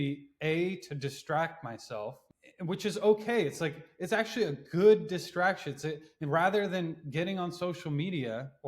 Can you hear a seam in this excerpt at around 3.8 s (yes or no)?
no